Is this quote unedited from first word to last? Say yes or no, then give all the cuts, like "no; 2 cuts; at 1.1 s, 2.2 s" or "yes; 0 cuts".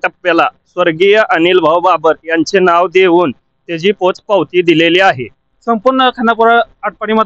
no; 1 cut; at 5.5 s